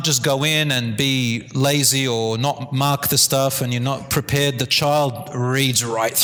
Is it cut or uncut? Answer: uncut